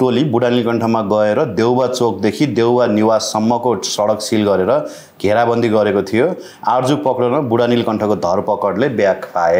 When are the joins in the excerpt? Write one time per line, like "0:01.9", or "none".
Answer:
0:06.5

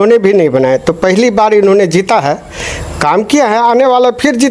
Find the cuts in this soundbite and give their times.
none

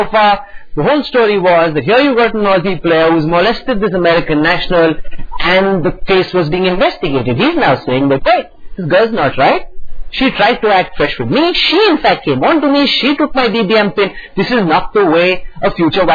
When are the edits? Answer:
none

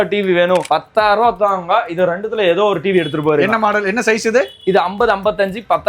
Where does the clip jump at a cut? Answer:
none

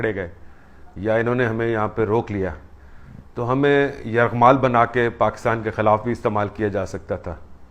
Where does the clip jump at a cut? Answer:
none

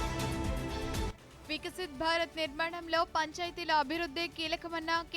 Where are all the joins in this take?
0:01.4

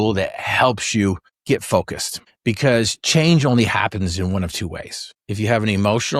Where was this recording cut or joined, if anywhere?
none

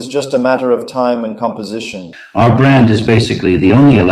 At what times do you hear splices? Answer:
0:02.1

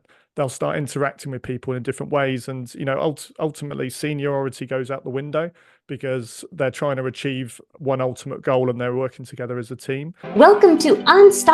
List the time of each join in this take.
0:10.2

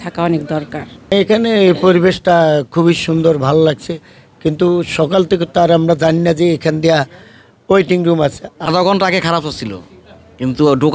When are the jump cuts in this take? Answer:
0:01.2
0:08.5

